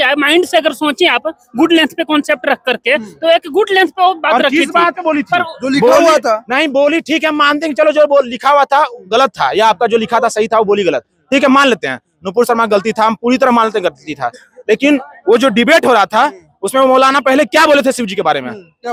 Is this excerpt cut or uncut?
uncut